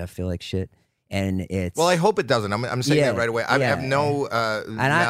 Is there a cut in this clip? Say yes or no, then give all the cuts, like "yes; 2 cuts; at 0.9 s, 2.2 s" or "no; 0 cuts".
no; 0 cuts